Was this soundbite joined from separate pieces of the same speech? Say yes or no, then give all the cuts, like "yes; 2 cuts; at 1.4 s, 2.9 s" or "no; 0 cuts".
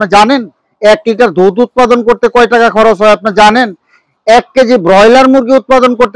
no; 0 cuts